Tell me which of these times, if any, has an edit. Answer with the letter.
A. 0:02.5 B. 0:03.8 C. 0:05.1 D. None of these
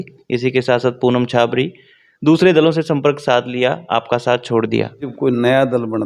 C